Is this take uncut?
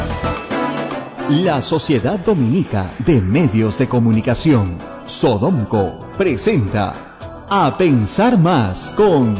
no; 1 cut; at 1.1 s

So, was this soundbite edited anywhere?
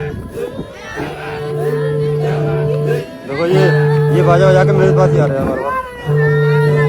no; 0 cuts

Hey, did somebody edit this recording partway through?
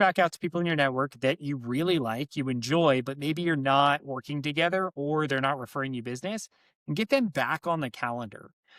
no; 0 cuts

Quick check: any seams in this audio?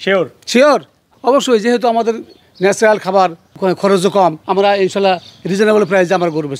yes; 3 cuts; at 1.1 s, 3.5 s, 4.4 s

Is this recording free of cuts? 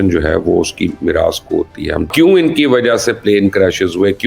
no; 1 cut; at 2.1 s

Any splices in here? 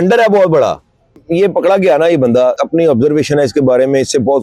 yes; 2 cuts; at 1.2 s, 2.6 s

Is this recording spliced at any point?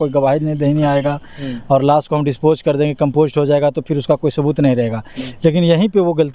no; 0 cuts

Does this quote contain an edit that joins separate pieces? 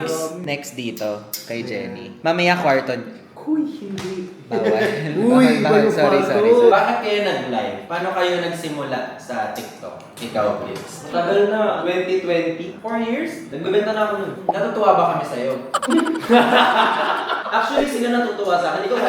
yes; 5 cuts; at 6.7 s, 11.0 s, 11.8 s, 13.5 s, 14.4 s

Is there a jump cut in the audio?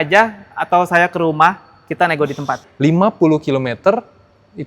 yes; 1 cut; at 2.6 s

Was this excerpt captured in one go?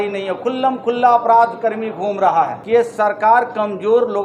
no; 1 cut; at 2.6 s

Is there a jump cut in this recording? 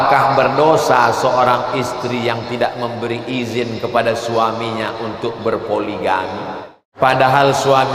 yes; 1 cut; at 6.9 s

